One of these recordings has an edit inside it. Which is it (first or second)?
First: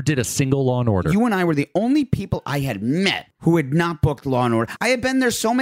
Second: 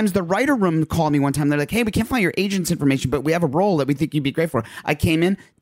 first